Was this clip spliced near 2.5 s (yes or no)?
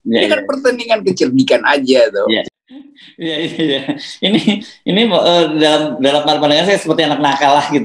yes